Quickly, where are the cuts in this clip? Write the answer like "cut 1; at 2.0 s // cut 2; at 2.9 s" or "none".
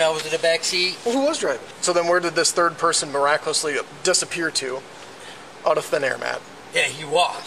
cut 1; at 1.7 s